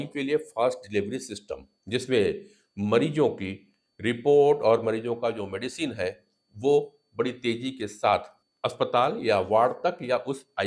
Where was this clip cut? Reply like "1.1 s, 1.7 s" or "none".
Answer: none